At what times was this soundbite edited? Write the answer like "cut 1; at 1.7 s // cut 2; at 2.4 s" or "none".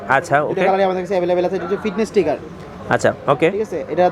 none